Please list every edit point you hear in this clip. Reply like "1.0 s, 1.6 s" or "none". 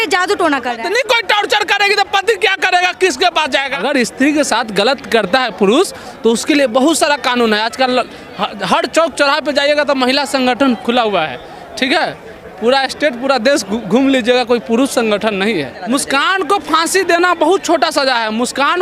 0.8 s, 3.7 s, 15.8 s